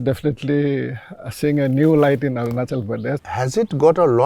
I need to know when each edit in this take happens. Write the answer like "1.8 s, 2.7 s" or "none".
3.2 s